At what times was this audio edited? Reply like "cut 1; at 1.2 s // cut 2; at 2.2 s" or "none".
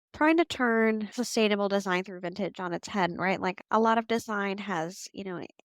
cut 1; at 1.1 s